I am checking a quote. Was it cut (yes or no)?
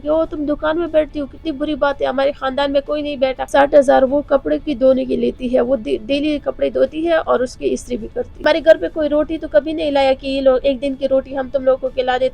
yes